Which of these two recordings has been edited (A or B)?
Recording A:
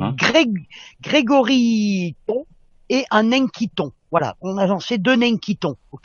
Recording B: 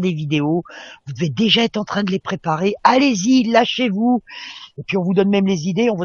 A